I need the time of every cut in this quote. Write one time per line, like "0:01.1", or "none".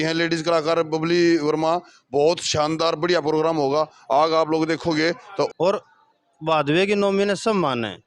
0:05.5